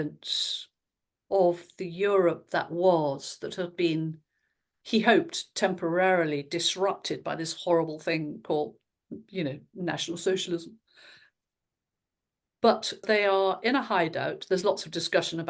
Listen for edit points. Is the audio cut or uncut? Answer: uncut